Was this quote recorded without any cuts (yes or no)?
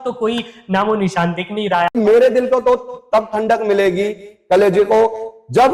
no